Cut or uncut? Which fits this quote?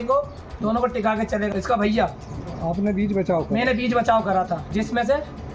cut